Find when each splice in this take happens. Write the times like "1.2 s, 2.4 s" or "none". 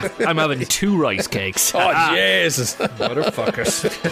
none

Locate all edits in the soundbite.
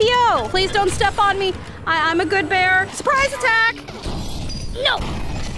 2.9 s

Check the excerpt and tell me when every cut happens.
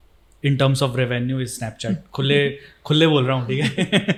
none

